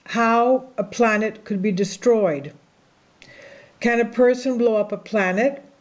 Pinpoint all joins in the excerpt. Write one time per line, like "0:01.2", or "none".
0:01.7